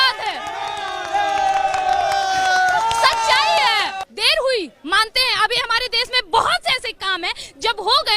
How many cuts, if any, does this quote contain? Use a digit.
1